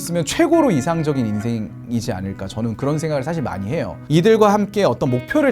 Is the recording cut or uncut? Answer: cut